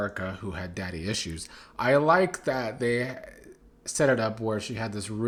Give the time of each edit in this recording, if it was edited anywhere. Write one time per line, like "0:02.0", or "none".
none

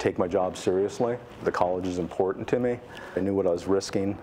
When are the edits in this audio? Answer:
0:03.2

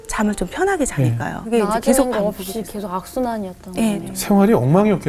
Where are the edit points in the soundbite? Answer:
0:01.4
0:04.0

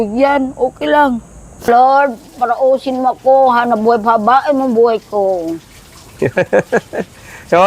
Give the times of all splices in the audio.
0:01.7

